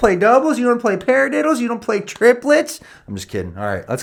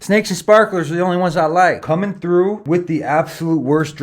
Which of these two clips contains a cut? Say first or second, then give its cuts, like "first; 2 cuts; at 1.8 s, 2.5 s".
second; 2 cuts; at 1.8 s, 2.6 s